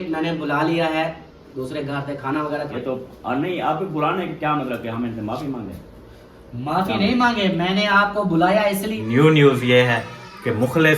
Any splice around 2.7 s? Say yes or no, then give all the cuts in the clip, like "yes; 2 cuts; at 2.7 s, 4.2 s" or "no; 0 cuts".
yes; 2 cuts; at 2.7 s, 9.0 s